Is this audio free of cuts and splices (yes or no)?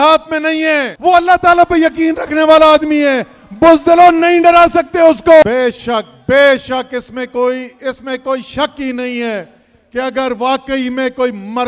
no